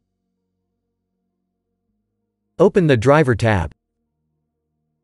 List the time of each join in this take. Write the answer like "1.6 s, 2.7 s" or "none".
2.5 s, 3.7 s